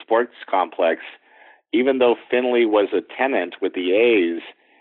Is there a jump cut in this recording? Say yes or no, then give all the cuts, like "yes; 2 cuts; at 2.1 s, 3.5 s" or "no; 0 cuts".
no; 0 cuts